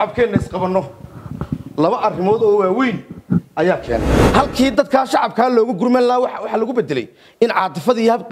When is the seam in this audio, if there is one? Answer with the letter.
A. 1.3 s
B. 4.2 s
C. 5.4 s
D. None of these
B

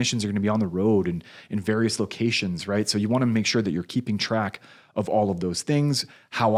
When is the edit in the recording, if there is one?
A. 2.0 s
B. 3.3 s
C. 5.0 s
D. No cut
D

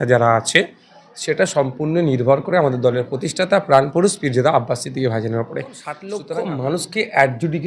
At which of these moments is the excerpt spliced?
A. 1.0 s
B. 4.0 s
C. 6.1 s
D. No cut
C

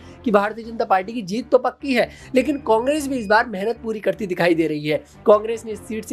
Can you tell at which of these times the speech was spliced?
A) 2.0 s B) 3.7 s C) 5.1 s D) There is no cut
D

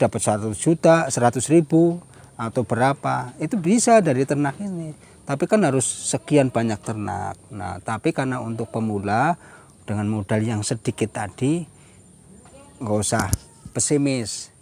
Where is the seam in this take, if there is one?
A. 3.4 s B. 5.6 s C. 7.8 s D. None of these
D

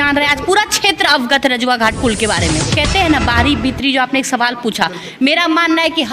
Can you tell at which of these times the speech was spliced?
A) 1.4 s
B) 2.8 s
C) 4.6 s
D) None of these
B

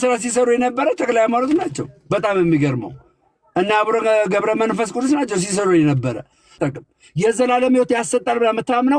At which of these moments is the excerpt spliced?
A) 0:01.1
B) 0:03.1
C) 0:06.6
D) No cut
C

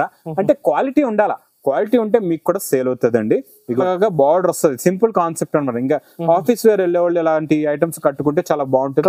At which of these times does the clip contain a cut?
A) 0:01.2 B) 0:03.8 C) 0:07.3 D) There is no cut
B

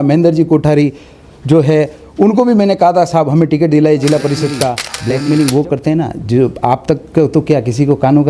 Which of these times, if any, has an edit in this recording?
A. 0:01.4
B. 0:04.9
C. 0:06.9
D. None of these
B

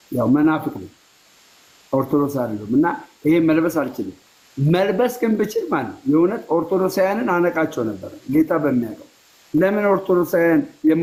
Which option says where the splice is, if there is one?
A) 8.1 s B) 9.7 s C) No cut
C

